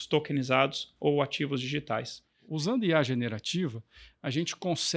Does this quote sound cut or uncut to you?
cut